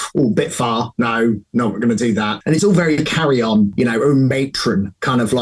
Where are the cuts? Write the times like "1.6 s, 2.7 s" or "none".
2.4 s, 3.7 s